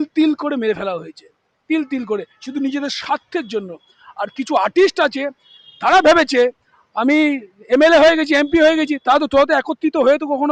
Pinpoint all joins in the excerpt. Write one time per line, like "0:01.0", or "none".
none